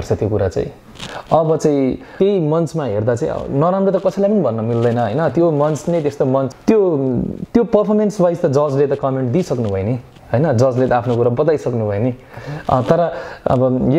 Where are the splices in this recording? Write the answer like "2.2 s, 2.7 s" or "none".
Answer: 2.1 s, 6.5 s